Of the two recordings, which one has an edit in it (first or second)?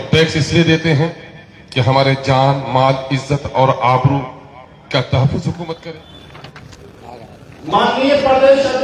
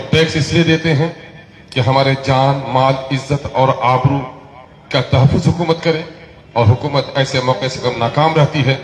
first